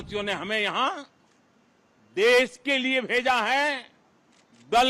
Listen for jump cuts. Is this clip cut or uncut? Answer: uncut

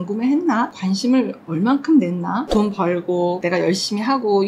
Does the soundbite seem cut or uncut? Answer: cut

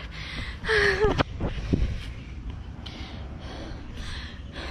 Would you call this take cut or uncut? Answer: uncut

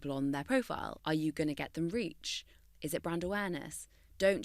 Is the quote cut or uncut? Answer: cut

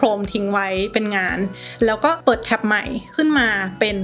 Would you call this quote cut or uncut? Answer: cut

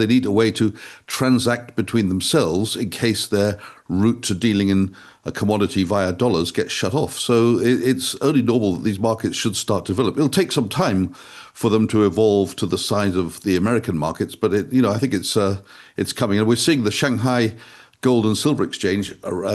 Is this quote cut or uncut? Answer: uncut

